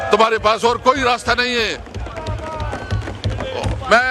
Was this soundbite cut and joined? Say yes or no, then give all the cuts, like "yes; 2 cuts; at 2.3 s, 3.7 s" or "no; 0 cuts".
no; 0 cuts